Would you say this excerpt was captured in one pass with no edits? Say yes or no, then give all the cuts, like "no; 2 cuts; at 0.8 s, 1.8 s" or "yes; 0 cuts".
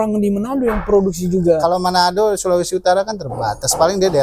yes; 0 cuts